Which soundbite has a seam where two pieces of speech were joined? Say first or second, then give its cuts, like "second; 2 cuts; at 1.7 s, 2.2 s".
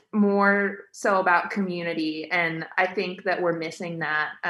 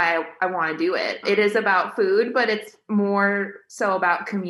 second; 1 cut; at 1.2 s